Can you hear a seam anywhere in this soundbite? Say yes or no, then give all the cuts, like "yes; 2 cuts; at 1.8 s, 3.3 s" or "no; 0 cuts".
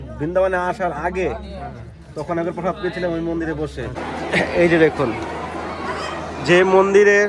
yes; 1 cut; at 4.0 s